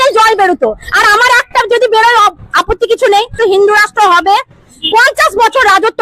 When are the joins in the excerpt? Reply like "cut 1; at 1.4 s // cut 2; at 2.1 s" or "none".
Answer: cut 1; at 3.4 s